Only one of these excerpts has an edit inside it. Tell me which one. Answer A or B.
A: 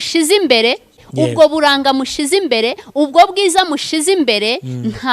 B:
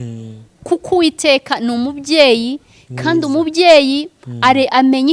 A